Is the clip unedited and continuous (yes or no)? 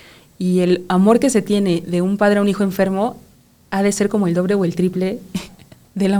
yes